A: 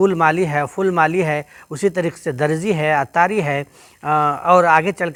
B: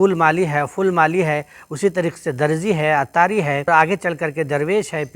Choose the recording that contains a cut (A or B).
B